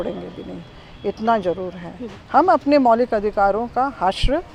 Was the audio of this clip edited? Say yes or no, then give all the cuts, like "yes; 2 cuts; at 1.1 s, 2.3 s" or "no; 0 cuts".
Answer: no; 0 cuts